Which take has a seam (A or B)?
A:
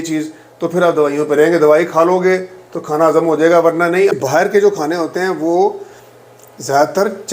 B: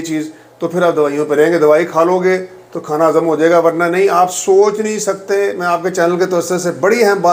A